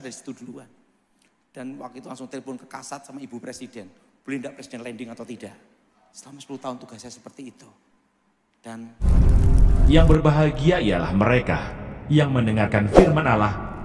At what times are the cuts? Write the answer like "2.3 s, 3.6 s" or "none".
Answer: 8.9 s